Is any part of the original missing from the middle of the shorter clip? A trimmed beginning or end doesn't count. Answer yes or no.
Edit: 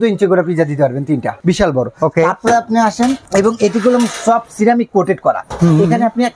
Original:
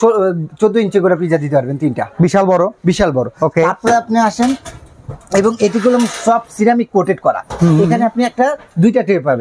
yes